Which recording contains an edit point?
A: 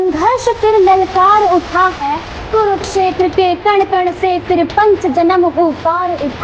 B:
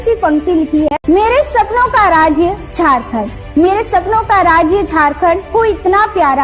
B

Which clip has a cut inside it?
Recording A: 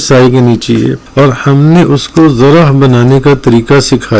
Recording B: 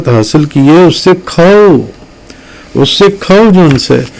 A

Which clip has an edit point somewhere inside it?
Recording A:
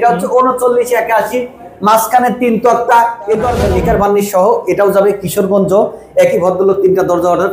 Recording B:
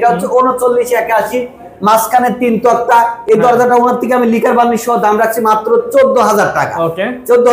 A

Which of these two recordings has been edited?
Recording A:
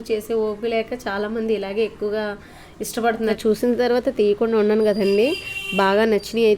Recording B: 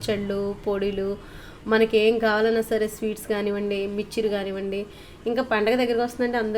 A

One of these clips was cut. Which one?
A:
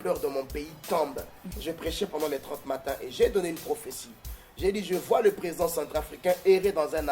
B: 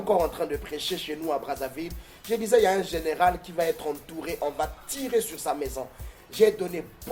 A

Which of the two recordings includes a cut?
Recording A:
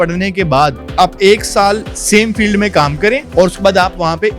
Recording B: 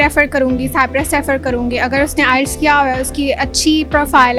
A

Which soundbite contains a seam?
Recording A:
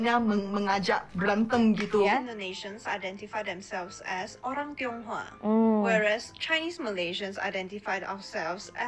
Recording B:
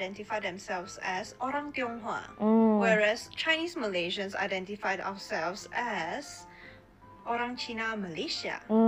A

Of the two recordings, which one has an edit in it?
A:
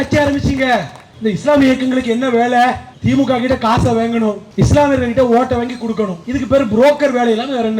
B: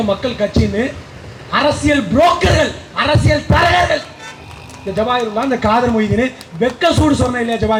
A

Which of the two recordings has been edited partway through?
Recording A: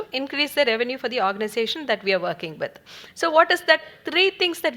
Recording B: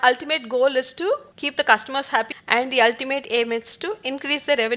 B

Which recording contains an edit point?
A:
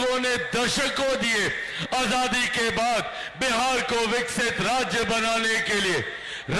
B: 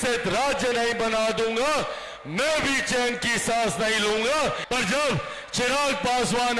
B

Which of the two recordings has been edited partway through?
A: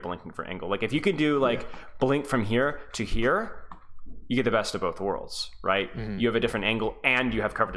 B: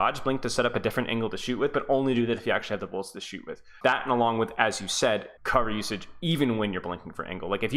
B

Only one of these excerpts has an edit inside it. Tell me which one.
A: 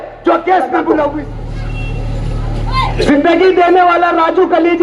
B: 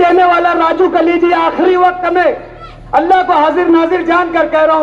A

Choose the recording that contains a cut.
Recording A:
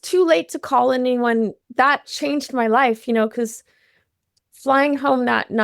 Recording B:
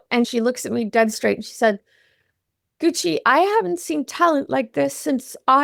A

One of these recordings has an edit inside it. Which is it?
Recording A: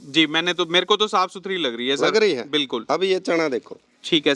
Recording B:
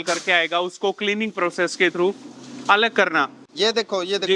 B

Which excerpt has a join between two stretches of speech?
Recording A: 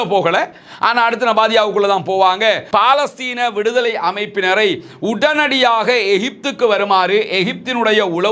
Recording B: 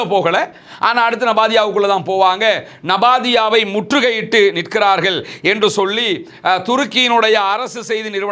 A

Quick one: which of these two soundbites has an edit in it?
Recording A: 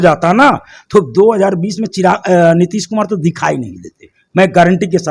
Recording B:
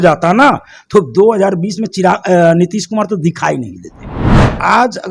B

